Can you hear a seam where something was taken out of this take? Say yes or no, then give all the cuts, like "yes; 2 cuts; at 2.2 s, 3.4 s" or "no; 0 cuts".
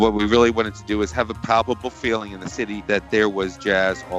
no; 0 cuts